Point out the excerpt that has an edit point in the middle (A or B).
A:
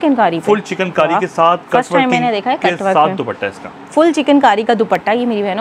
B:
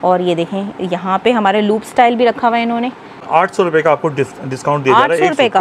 B